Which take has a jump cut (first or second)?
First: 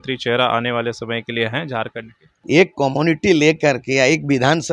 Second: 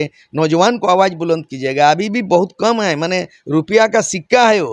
first